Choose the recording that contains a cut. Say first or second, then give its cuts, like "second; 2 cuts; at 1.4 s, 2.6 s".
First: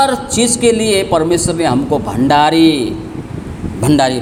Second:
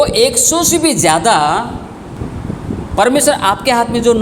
second; 1 cut; at 2.2 s